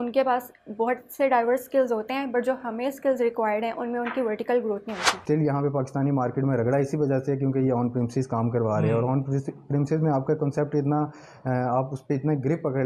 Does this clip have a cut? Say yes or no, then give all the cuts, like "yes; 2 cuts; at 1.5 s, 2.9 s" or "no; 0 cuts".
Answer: yes; 1 cut; at 5.2 s